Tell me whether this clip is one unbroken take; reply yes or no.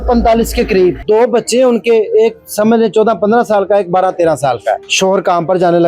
no